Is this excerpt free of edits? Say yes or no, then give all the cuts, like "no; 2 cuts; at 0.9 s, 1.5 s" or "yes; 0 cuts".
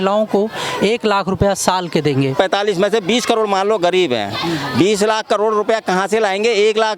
no; 1 cut; at 2.3 s